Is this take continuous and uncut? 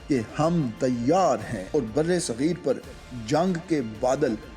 no; 1 cut; at 1.6 s

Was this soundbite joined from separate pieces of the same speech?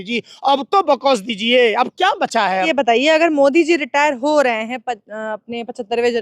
yes; 1 cut; at 2.7 s

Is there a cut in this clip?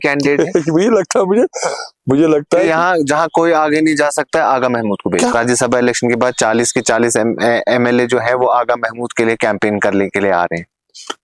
yes; 1 cut; at 5.4 s

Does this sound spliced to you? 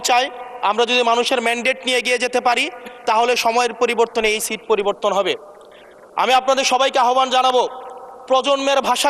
no; 0 cuts

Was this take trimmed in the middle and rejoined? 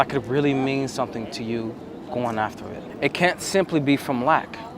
yes; 1 cut; at 2.9 s

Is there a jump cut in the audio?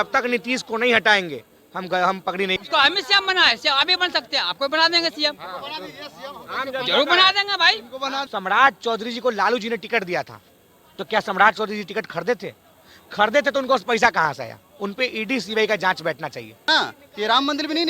yes; 3 cuts; at 2.6 s, 8.3 s, 16.7 s

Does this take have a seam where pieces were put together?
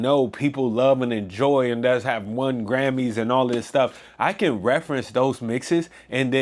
no; 0 cuts

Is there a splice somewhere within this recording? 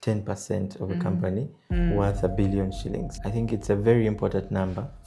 yes; 1 cut; at 3.1 s

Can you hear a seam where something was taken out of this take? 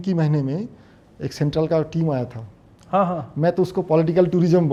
no; 0 cuts

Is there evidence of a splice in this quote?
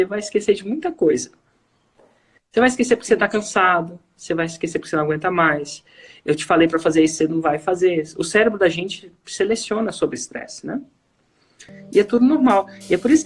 no; 0 cuts

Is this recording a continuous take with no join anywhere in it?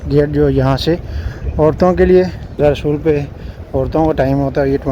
no; 1 cut; at 2.6 s

